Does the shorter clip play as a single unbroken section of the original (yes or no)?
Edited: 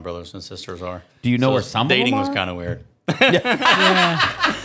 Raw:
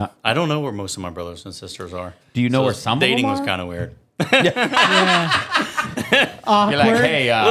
yes